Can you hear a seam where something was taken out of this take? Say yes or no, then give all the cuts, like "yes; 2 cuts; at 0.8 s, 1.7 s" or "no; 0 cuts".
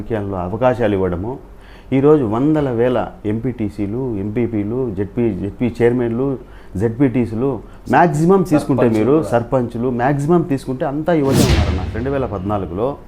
yes; 1 cut; at 11.9 s